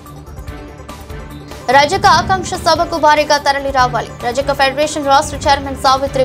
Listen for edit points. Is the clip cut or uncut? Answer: cut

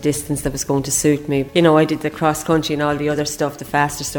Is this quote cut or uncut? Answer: cut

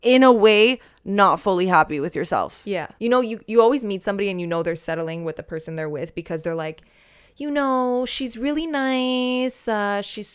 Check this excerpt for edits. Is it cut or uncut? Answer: cut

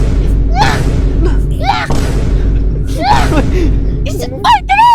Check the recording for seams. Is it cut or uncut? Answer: uncut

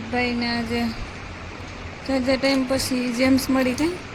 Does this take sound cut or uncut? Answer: uncut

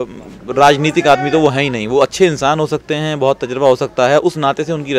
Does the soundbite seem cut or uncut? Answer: uncut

